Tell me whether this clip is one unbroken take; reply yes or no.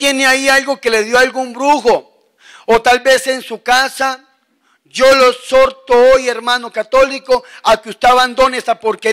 yes